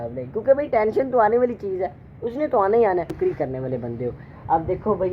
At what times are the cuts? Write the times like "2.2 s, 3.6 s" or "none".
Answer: 3.1 s